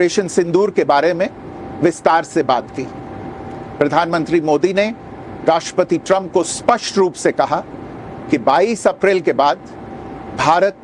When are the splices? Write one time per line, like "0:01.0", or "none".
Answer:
none